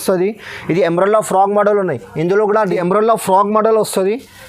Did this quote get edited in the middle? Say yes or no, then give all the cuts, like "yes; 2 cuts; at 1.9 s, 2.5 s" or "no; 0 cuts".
yes; 1 cut; at 2.7 s